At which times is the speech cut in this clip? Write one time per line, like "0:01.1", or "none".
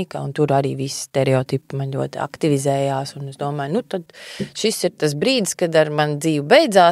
none